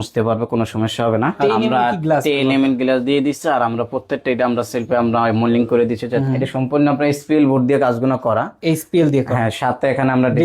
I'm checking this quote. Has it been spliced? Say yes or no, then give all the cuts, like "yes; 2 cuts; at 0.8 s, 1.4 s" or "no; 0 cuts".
yes; 2 cuts; at 1.4 s, 6.2 s